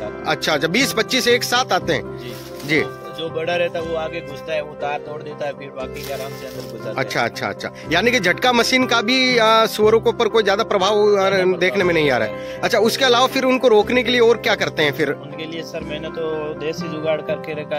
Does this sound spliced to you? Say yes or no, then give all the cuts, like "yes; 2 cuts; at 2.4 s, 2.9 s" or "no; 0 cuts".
no; 0 cuts